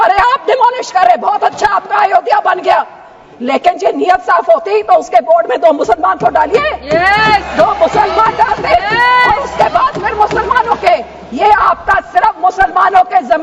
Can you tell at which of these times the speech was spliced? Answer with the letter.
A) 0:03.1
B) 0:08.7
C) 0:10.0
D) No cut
D